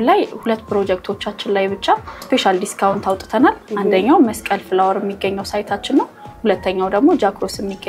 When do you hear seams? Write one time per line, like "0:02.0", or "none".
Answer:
0:02.2